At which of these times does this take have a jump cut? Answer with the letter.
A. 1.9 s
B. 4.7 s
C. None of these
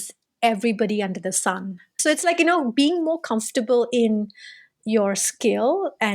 A